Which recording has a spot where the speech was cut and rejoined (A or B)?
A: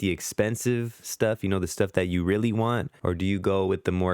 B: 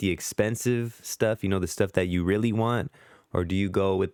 A